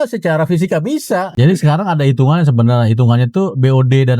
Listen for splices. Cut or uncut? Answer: cut